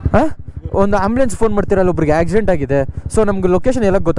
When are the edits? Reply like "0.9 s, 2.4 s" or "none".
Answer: none